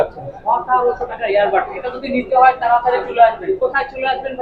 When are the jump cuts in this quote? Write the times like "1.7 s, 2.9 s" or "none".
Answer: none